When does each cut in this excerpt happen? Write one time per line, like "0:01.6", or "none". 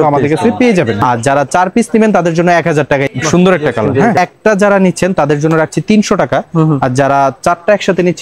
0:01.0
0:03.1
0:04.2

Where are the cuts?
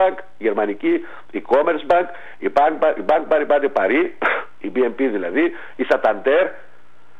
none

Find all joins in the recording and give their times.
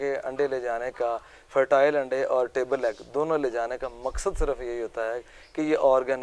none

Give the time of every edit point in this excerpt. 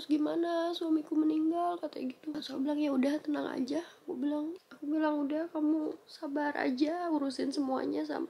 0:02.3
0:04.7

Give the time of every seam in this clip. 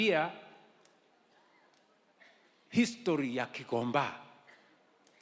none

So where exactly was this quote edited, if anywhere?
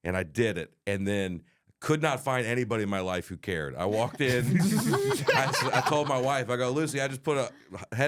none

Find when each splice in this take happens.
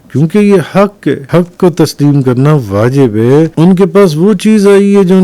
0:01.2
0:03.5

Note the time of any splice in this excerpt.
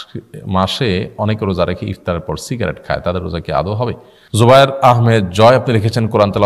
0:04.1

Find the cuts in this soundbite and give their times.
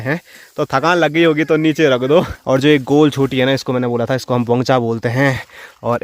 0:02.3

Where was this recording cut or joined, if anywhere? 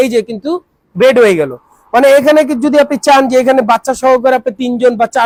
none

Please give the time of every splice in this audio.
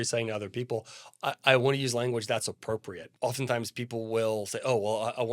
0:03.0

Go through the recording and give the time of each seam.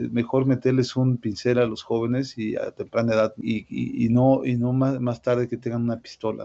0:03.4

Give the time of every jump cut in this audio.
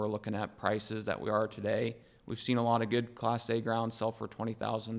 none

